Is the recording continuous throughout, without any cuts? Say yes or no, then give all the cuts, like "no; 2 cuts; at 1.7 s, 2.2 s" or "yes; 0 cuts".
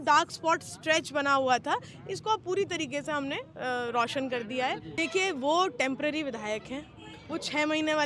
no; 1 cut; at 4.9 s